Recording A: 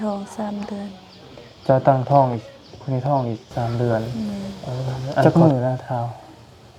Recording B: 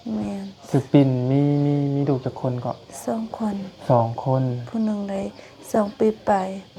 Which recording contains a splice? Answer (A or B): A